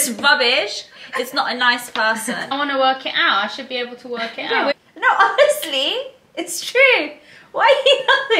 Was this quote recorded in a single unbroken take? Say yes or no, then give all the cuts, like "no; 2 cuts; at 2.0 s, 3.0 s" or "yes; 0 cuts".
no; 2 cuts; at 2.5 s, 4.8 s